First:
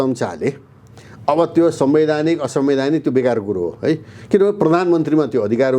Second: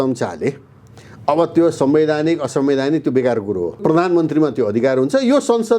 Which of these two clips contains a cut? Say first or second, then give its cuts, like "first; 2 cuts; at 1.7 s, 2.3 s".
second; 1 cut; at 3.8 s